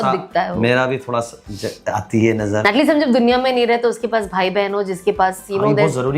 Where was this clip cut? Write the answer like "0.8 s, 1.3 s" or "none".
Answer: 2.6 s